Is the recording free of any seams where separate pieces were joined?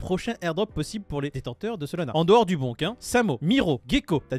yes; 0 cuts

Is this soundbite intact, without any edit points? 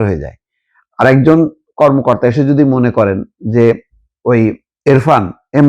no; 1 cut; at 4.7 s

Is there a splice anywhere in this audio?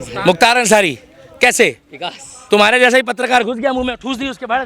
no; 0 cuts

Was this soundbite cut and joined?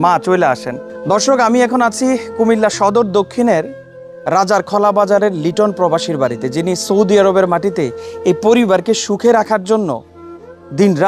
no; 0 cuts

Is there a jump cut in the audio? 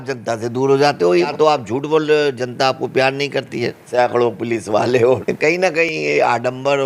yes; 3 cuts; at 1.3 s, 3.8 s, 5.6 s

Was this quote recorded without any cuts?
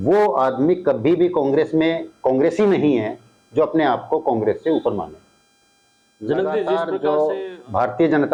no; 1 cut; at 6.9 s

